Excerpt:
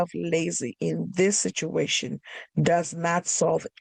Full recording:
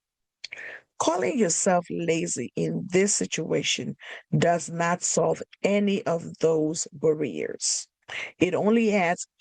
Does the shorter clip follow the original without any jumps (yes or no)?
yes